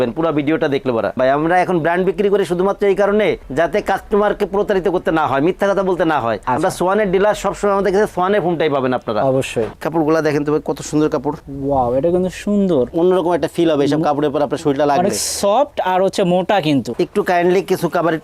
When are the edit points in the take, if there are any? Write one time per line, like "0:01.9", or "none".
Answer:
0:01.2
0:06.4
0:09.8
0:12.9
0:16.9

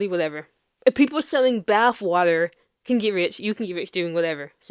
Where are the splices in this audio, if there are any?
0:02.7

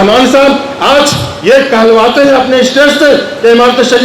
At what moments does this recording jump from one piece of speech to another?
none

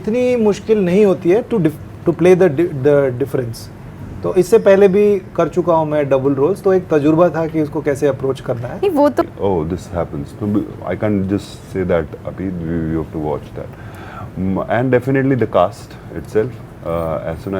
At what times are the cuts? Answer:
0:09.2

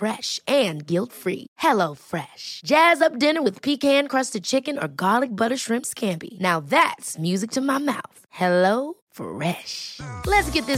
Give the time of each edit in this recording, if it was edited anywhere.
none

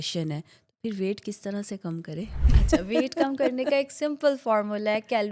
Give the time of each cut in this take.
none

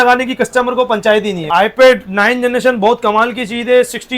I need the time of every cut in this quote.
0:01.4

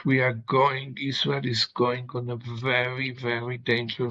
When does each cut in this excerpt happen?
none

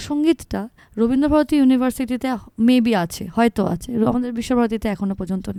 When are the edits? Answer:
none

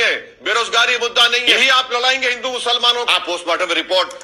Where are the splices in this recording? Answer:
0:01.5
0:03.1

